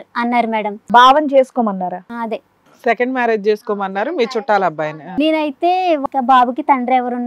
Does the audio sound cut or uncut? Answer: cut